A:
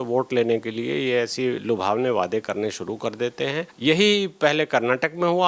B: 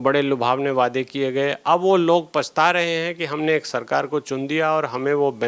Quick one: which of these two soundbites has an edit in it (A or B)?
A